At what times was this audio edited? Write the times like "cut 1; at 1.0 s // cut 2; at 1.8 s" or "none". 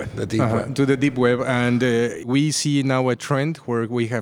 cut 1; at 2.2 s